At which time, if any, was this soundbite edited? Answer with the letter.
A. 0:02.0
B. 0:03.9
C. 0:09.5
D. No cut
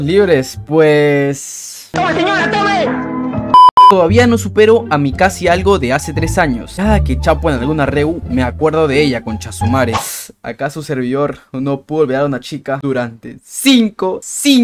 B